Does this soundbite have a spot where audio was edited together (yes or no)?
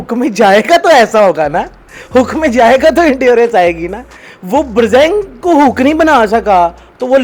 no